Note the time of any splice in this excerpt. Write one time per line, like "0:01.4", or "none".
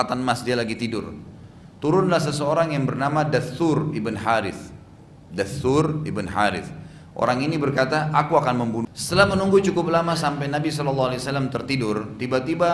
0:08.9